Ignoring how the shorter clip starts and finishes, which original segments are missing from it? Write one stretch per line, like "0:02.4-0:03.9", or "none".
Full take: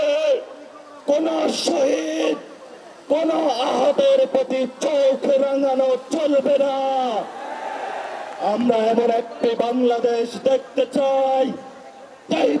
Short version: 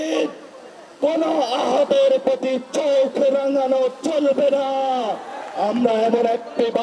0:07.4-0:08.2